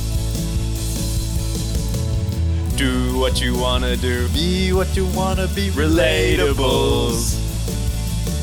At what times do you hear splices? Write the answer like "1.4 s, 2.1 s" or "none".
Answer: none

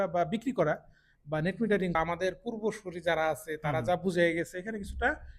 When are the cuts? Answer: 2.0 s

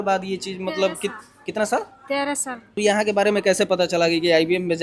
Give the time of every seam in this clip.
2.8 s

